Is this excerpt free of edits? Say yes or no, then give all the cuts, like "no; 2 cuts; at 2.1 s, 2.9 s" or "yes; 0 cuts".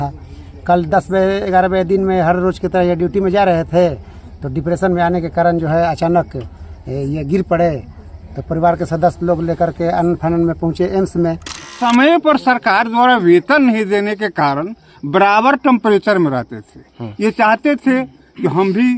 no; 1 cut; at 11.7 s